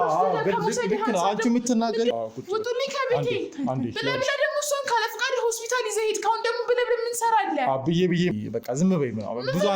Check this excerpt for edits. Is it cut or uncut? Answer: cut